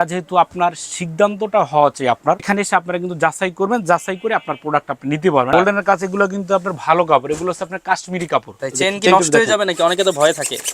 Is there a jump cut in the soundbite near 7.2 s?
no; 3 cuts; at 2.4 s, 5.5 s, 8.6 s

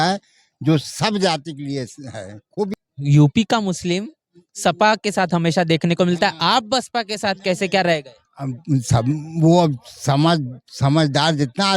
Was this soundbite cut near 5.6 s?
no; 1 cut; at 2.7 s

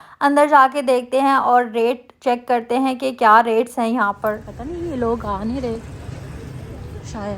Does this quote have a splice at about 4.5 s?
yes; 1 cut; at 4.5 s

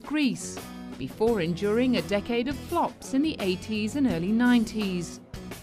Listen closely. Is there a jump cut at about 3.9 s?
yes; 1 cut; at 3.9 s

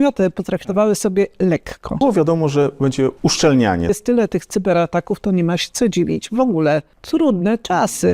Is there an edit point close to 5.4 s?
no; 4 cuts; at 2.0 s, 3.1 s, 3.9 s, 6.9 s

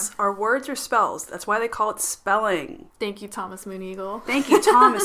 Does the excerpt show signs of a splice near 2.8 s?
yes; 1 cut; at 2.8 s

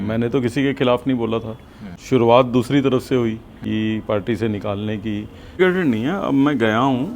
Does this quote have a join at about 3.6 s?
yes; 3 cuts; at 1.9 s, 3.6 s, 5.6 s

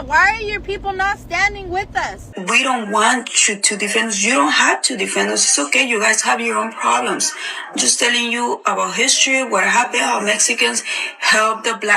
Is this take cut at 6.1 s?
no; 1 cut; at 2.2 s

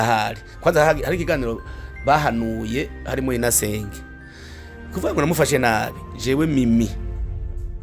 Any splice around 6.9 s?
yes; 1 cut; at 6.9 s

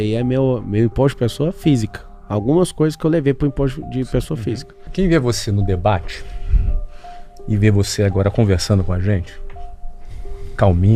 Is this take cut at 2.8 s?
no; 1 cut; at 4.9 s

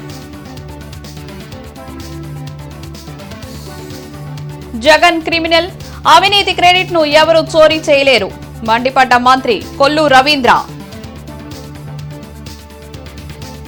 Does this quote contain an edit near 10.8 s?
no; 0 cuts

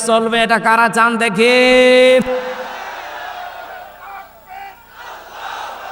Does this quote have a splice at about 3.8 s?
no; 1 cut; at 2.6 s

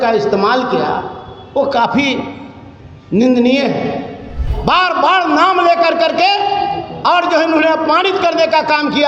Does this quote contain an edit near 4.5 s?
yes; 1 cut; at 4.5 s

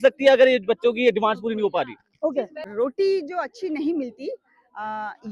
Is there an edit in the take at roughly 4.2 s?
no; 1 cut; at 2.6 s

